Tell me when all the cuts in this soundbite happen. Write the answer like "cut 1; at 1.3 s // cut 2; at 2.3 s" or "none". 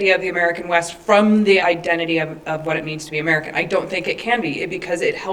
cut 1; at 1.6 s